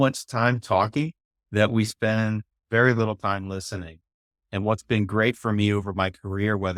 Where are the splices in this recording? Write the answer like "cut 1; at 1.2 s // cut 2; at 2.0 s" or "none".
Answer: none